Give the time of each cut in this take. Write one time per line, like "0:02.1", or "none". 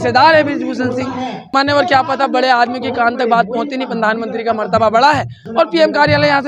0:01.5
0:05.4